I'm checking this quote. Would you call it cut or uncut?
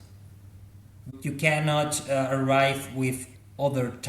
cut